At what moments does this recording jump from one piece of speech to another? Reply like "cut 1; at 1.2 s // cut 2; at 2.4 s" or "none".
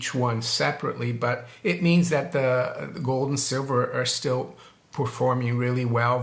none